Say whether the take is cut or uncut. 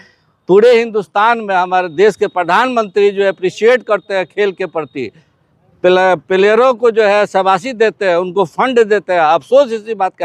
uncut